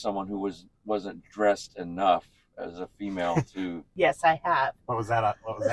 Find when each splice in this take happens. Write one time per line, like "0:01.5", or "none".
0:03.8